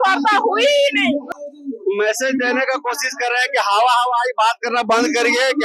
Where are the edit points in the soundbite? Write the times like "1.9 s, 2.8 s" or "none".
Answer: 1.3 s